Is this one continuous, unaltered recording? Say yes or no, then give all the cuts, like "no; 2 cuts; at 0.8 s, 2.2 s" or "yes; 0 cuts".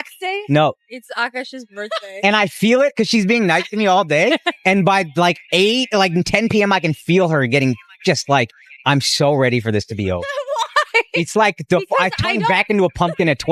yes; 0 cuts